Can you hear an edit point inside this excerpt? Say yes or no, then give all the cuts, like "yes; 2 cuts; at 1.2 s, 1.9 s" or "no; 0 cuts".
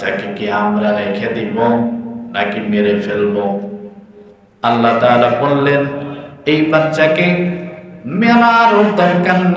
no; 0 cuts